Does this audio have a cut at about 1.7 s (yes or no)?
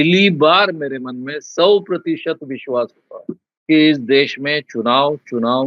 no